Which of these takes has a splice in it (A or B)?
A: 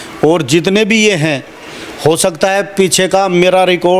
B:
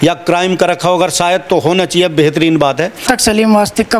B